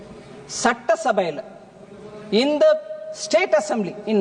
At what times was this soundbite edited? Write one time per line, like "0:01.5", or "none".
none